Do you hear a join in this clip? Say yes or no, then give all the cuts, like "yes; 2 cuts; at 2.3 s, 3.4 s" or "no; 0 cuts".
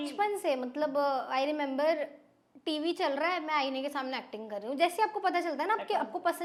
no; 0 cuts